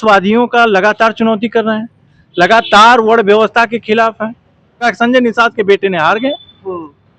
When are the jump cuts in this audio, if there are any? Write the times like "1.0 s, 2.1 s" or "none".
4.9 s